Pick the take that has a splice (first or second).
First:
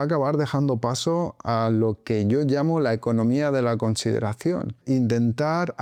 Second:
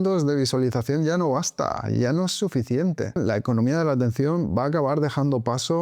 second